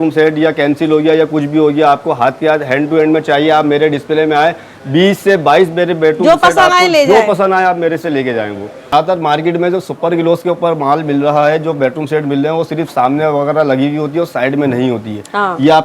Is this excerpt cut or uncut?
cut